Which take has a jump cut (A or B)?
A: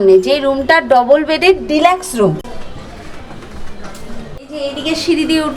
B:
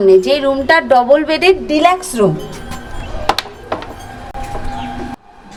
A